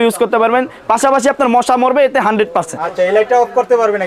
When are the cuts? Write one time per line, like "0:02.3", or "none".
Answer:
none